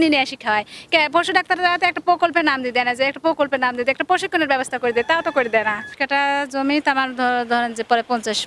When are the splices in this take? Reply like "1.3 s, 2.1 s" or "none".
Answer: 5.9 s